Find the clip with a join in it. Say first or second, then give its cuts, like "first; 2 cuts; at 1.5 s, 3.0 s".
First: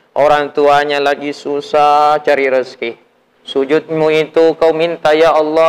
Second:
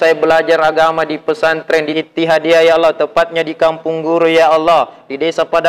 second; 1 cut; at 1.7 s